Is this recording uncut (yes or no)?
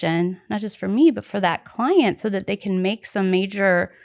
yes